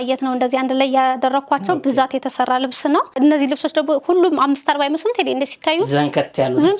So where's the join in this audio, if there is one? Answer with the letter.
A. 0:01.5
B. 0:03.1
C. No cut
B